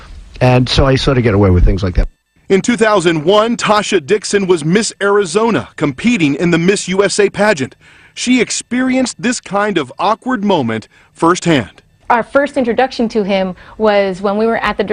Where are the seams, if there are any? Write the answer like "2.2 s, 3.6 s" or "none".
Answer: none

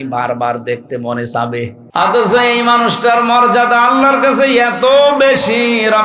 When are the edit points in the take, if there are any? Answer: 1.8 s

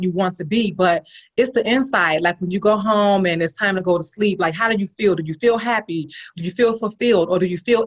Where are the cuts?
6.2 s

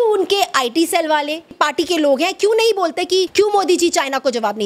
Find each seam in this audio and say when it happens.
1.5 s, 3.3 s

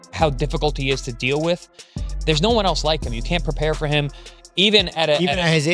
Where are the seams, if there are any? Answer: none

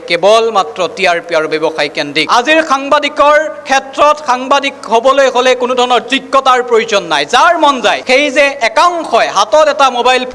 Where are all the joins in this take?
2.2 s, 8.0 s

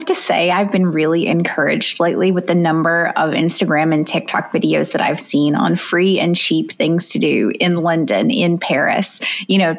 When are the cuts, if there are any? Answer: none

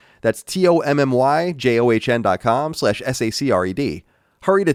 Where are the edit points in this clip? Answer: none

